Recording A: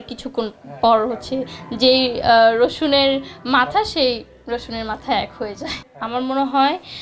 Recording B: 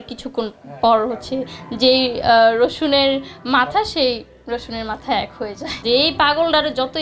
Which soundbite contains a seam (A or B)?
B